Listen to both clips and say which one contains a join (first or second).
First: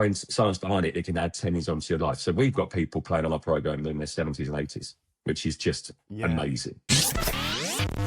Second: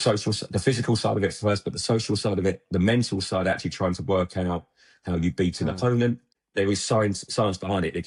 first